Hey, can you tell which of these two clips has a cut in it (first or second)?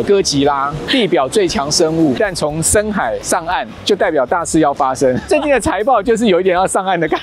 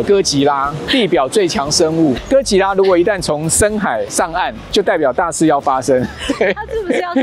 first